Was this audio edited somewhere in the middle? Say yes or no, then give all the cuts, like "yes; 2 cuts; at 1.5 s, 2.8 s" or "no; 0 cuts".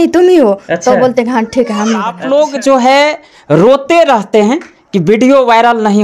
yes; 1 cut; at 2.1 s